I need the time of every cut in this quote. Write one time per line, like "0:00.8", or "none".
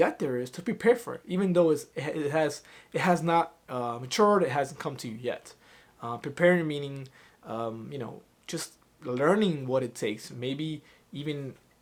none